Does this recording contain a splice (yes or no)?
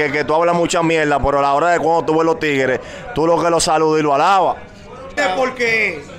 yes